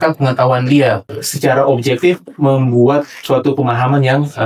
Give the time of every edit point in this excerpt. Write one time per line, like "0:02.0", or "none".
0:01.1